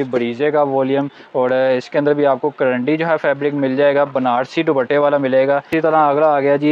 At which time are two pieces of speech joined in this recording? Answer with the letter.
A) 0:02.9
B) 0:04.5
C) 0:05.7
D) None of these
C